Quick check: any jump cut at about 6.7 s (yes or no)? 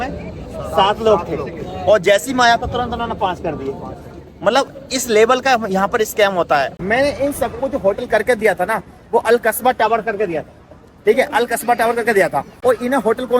yes